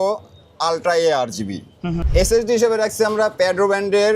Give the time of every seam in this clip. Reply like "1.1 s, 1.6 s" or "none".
2.0 s